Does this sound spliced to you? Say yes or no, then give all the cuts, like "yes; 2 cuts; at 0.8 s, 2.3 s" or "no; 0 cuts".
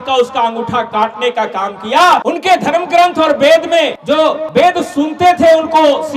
yes; 2 cuts; at 2.2 s, 4.4 s